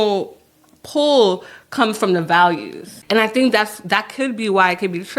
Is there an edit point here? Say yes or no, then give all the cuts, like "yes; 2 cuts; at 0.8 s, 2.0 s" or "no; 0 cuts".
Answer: yes; 1 cut; at 2.9 s